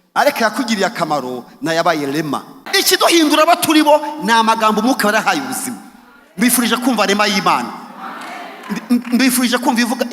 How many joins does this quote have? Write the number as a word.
one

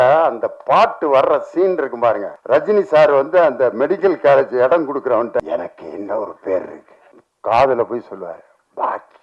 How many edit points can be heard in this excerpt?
zero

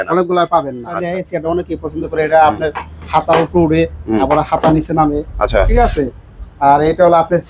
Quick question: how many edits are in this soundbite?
one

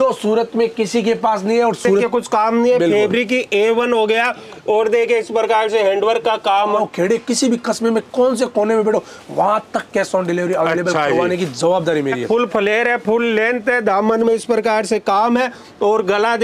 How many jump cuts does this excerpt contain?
three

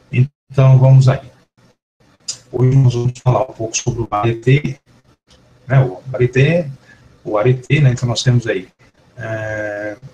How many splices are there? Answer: one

